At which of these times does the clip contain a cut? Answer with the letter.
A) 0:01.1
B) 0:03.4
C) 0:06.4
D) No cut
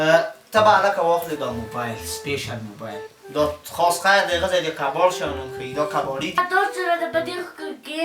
C